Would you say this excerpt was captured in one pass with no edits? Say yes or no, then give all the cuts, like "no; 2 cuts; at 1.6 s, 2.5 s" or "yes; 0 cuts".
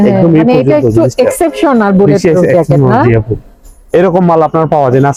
yes; 0 cuts